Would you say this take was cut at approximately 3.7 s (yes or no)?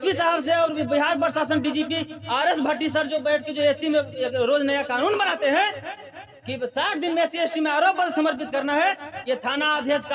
no